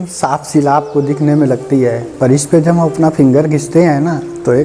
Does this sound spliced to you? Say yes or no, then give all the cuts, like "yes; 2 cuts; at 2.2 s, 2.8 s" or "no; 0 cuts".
no; 0 cuts